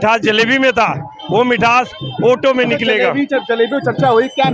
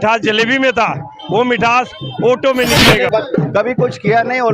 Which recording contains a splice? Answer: second; 1 cut; at 3.1 s

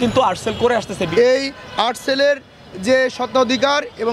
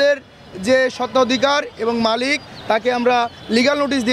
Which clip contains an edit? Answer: first; 1 cut; at 1.1 s

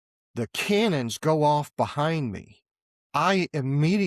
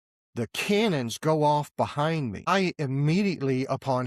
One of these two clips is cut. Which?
second; 1 cut; at 2.5 s

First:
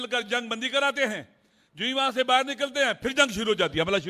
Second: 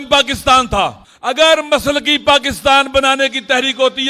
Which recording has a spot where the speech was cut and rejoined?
second; 1 cut; at 1.1 s

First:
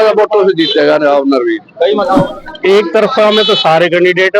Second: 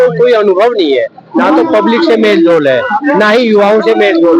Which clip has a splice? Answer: first; 1 cut; at 2.3 s

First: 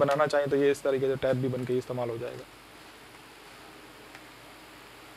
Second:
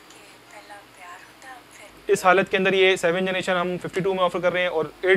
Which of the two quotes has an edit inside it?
second; 1 cut; at 1.9 s

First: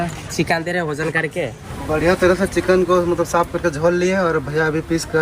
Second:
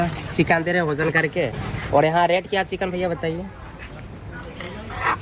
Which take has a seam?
first; 1 cut; at 1.7 s

